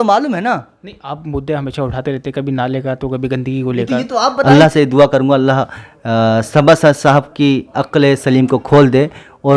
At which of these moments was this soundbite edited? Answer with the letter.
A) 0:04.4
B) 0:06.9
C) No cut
A